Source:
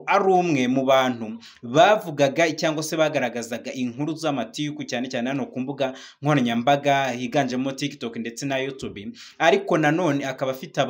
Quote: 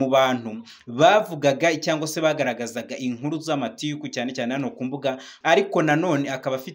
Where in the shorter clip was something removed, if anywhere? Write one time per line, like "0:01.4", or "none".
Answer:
0:05.3